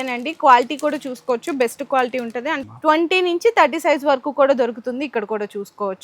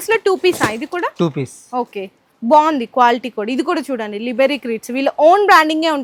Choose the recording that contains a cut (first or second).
first